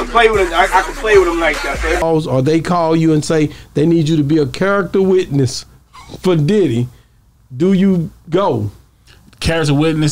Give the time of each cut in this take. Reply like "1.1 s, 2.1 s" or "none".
2.0 s